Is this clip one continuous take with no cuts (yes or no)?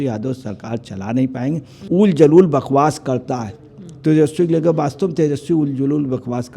no